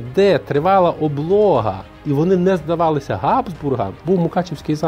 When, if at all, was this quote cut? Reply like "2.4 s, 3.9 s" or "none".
3.9 s